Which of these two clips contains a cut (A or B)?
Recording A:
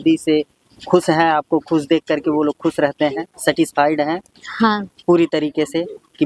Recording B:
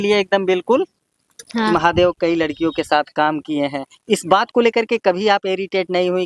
B